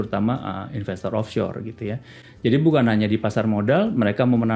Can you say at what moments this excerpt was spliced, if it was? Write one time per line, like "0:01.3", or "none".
none